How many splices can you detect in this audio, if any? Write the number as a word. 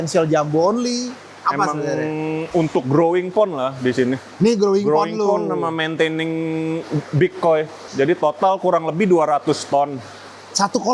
one